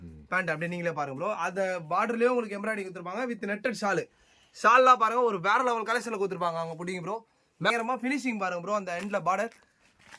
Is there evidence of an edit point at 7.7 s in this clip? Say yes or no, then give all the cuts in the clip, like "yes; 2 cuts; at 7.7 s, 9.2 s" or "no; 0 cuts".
yes; 1 cut; at 7.7 s